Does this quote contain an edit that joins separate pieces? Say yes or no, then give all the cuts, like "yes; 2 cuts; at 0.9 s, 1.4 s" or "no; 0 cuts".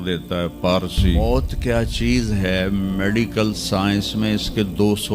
yes; 1 cut; at 1.2 s